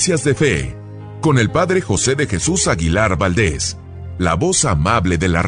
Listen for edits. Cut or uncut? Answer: uncut